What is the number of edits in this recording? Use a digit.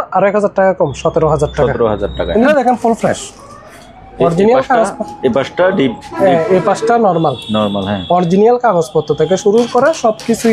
1